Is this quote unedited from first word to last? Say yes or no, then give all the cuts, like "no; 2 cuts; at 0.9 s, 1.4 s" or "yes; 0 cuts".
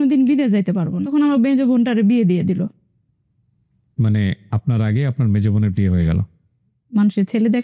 no; 2 cuts; at 1.0 s, 6.8 s